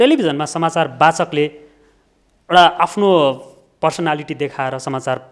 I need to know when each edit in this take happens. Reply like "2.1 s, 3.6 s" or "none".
none